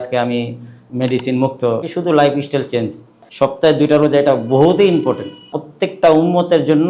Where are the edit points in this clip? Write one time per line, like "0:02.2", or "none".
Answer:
0:01.9
0:03.2
0:05.6